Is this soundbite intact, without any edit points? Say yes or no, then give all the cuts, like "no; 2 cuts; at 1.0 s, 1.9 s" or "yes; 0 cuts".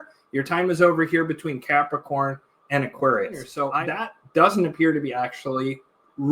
no; 1 cut; at 3.5 s